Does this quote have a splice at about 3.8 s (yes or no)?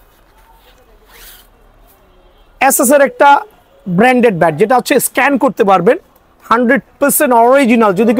no